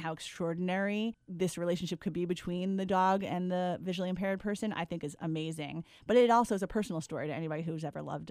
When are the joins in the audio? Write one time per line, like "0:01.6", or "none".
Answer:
none